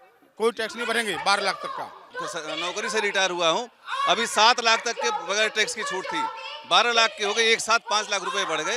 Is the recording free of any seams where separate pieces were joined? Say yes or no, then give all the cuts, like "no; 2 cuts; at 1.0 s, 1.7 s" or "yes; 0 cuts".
no; 1 cut; at 2.0 s